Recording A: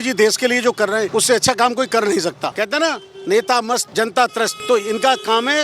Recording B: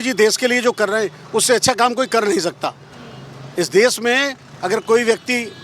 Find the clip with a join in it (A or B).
A